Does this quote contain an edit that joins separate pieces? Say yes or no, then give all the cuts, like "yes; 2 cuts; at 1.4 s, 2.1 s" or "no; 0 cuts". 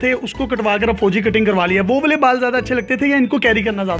no; 0 cuts